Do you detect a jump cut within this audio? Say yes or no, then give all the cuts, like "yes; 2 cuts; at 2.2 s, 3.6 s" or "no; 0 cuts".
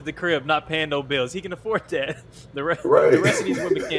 no; 0 cuts